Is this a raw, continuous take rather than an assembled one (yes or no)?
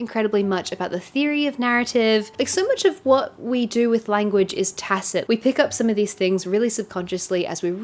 yes